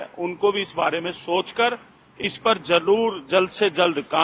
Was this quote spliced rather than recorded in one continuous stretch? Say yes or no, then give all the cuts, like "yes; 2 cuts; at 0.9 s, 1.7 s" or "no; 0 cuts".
no; 0 cuts